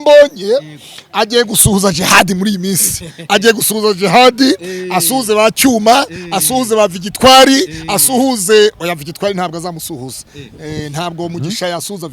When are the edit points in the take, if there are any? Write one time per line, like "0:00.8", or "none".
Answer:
none